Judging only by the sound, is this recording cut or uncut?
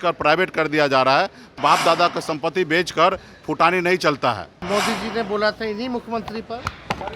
cut